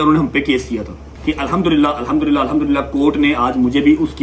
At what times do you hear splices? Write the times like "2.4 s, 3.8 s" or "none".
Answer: 1.1 s